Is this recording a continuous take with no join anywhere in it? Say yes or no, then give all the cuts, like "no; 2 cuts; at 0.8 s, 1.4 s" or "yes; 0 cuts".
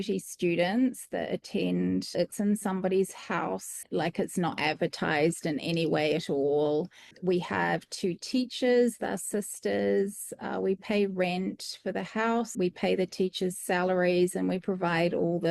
no; 4 cuts; at 2.1 s, 3.7 s, 7.1 s, 12.5 s